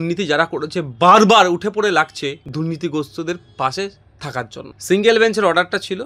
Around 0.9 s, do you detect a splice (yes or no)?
no